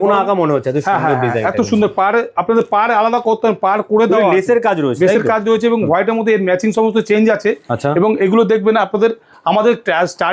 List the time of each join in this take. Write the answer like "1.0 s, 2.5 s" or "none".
none